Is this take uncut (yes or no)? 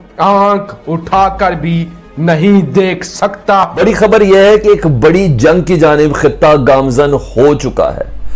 no